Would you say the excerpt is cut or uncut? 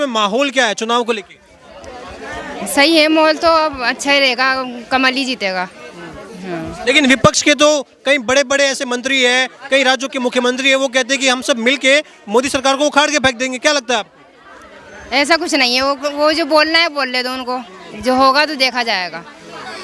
uncut